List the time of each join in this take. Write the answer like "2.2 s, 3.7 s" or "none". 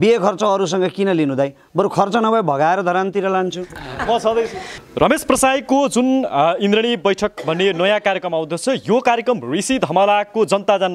4.7 s